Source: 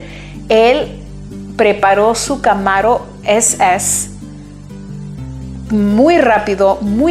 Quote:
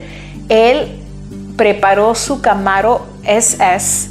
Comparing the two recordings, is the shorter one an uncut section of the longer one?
yes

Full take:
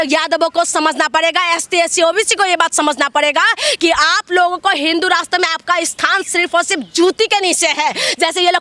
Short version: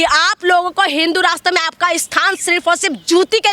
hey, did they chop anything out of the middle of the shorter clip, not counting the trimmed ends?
no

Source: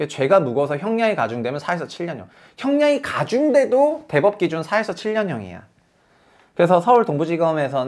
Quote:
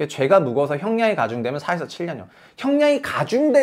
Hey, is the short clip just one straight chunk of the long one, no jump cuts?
yes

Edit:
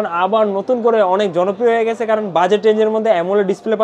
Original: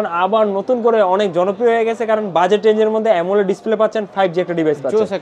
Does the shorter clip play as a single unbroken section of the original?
yes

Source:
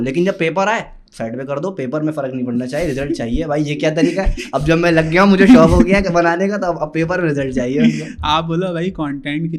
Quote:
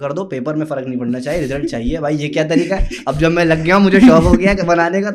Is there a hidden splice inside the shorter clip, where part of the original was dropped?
no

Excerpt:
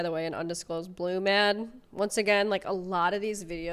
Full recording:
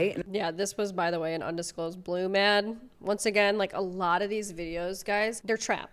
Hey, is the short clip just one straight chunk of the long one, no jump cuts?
yes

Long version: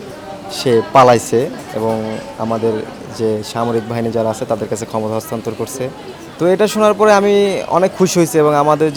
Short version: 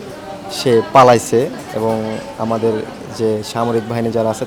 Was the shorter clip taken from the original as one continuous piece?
yes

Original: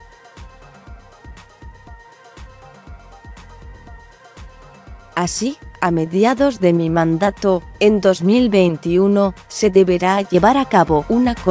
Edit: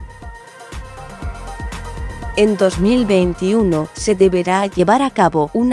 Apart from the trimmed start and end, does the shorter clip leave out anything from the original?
yes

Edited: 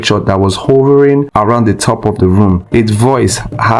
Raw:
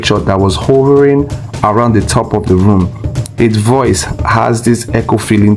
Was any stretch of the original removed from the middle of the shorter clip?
yes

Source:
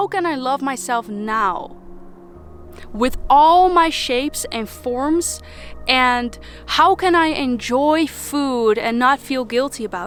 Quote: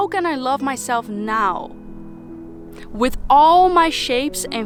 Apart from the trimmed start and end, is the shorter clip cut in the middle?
no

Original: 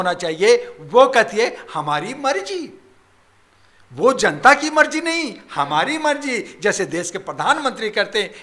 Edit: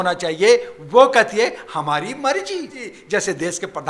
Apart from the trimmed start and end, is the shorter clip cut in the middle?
yes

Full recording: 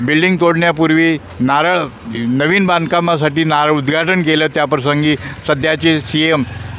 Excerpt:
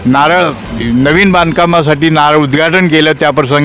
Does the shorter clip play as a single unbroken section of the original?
yes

